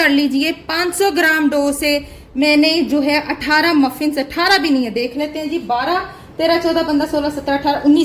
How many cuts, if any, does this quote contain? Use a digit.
0